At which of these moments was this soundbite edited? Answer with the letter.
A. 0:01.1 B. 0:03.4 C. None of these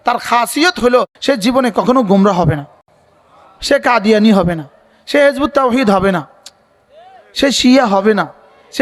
A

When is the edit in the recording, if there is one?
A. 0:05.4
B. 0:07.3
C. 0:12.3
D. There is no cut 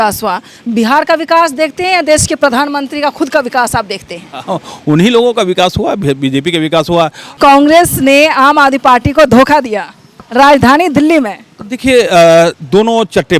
B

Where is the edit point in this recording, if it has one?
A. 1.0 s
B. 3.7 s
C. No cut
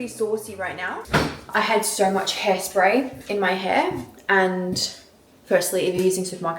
A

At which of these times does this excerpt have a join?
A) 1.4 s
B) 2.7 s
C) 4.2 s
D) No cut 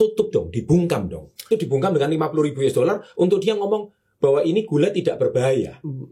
A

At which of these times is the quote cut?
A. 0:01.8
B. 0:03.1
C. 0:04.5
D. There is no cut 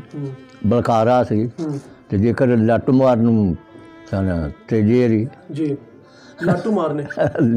D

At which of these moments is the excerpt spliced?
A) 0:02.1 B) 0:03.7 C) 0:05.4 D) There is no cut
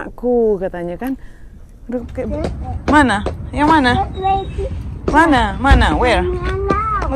A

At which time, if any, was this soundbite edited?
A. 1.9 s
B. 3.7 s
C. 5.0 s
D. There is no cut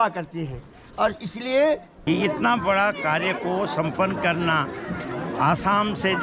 A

